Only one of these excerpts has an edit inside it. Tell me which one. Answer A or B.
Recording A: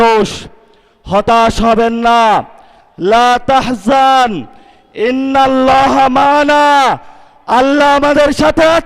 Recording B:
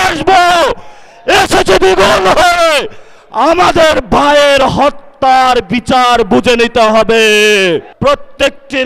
B